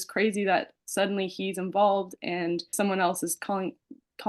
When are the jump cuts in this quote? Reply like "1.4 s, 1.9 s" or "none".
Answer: 2.7 s